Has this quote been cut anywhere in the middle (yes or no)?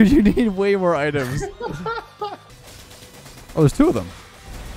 yes